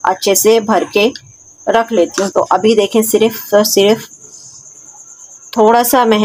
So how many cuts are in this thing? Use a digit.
1